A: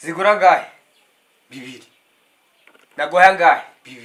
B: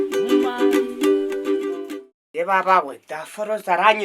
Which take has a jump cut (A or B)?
B